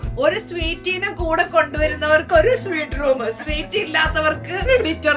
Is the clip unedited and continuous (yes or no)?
yes